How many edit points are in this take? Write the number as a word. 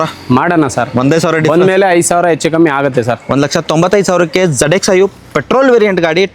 zero